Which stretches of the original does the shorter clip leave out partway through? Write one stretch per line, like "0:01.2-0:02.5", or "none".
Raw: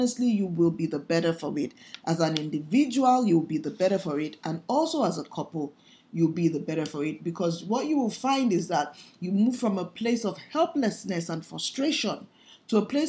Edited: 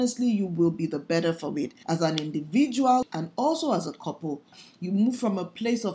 0:01.8-0:01.9
0:03.2-0:04.3
0:06.0-0:09.0

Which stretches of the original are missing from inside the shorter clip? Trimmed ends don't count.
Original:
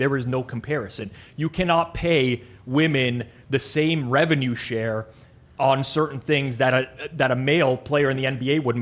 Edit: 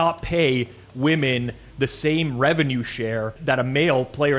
0:05.1-0:07.1

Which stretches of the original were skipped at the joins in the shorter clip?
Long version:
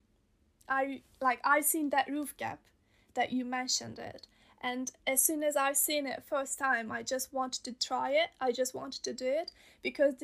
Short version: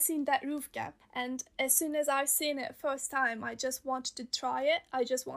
0:02.7-0:04.5

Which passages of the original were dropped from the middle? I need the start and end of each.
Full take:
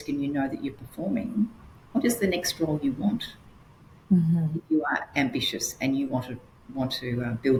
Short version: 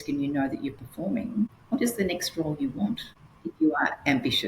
0:01.6-0:01.8
0:03.7-0:04.6

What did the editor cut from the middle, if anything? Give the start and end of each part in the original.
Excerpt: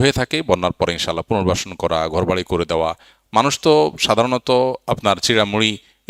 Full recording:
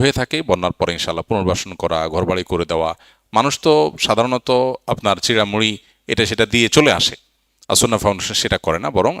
none

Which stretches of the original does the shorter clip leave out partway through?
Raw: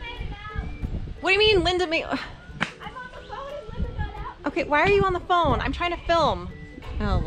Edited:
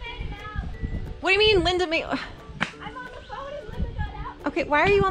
none

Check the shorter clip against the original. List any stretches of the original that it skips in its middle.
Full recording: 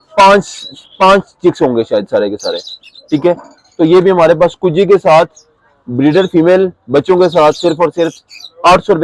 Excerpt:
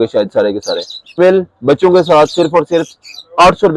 0:02.9-0:06.4

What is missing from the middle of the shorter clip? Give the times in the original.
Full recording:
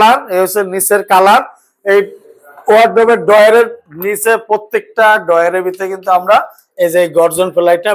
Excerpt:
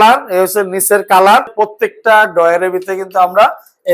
0:01.5-0:04.4

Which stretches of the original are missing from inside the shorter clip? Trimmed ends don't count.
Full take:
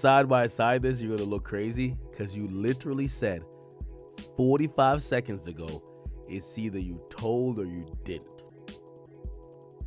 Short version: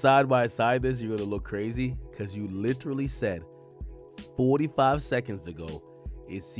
none

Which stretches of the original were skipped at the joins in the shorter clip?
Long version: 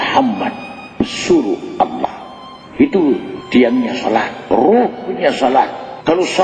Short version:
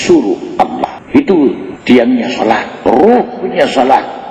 0:02.1-0:02.6

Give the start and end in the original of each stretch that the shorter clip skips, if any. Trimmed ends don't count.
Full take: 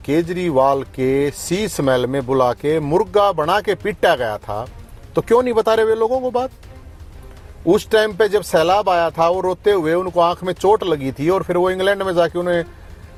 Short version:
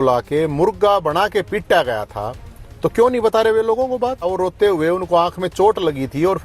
0:06.6-0:09.3

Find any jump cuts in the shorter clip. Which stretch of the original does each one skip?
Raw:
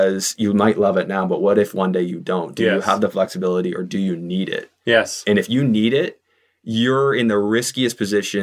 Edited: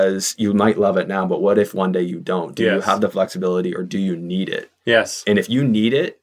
none

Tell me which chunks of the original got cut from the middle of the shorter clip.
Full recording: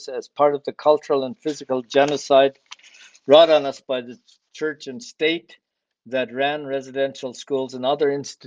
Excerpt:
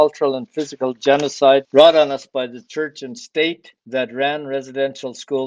0:02.6-0:03.2
0:04.1-0:04.5
0:05.6-0:05.9

